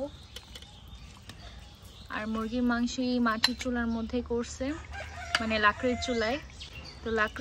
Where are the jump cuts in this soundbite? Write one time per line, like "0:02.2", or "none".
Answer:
none